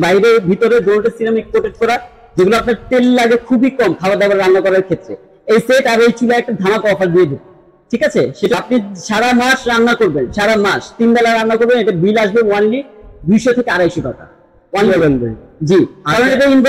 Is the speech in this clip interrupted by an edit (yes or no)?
yes